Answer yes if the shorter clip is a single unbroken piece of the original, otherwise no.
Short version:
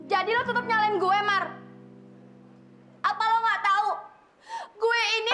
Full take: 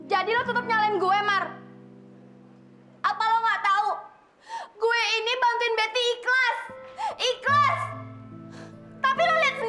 yes